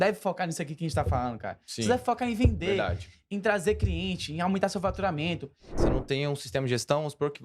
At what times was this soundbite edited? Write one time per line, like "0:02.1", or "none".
0:05.7